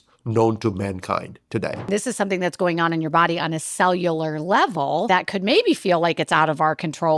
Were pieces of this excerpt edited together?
yes; 2 cuts; at 1.9 s, 5.1 s

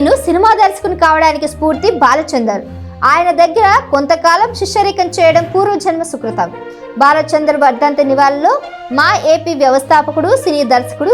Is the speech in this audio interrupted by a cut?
no; 0 cuts

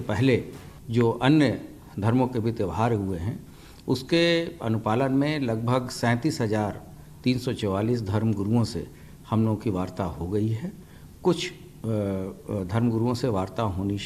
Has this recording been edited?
no; 0 cuts

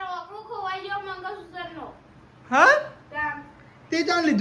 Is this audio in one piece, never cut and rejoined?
yes; 0 cuts

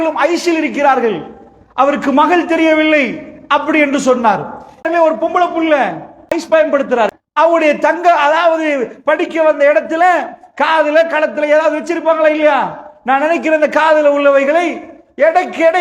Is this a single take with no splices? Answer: no; 3 cuts; at 4.9 s, 6.4 s, 7.2 s

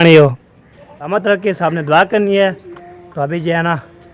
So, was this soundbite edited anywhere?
yes; 1 cut; at 1.1 s

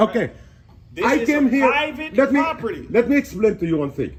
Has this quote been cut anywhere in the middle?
no; 0 cuts

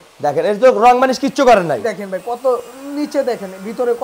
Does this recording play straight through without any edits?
yes; 0 cuts

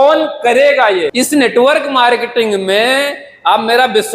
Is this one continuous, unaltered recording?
no; 1 cut; at 1.1 s

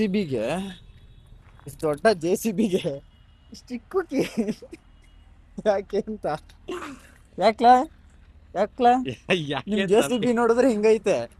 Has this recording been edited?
no; 0 cuts

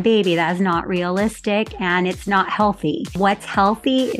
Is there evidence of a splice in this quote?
yes; 1 cut; at 3.1 s

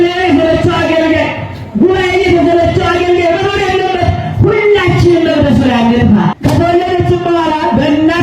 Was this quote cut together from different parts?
yes; 1 cut; at 6.4 s

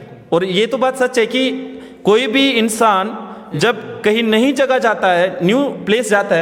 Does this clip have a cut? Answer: no; 0 cuts

